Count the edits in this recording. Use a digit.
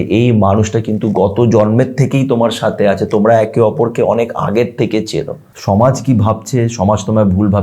1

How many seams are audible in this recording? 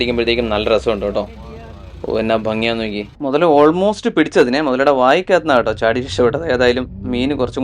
1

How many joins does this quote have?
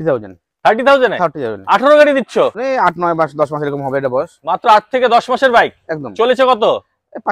1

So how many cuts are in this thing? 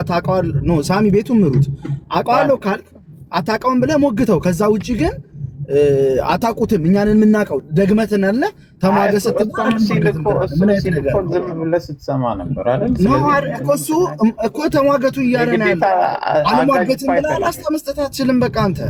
0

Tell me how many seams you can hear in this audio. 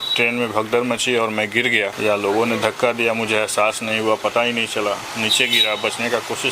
1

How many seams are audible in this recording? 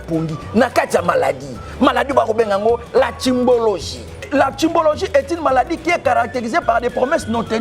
1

